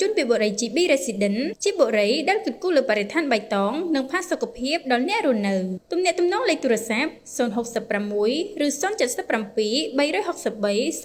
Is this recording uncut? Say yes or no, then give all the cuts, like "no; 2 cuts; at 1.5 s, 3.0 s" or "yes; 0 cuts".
yes; 0 cuts